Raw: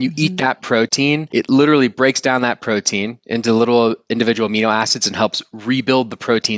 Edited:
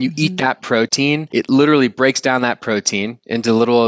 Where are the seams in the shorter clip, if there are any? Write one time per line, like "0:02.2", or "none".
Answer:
none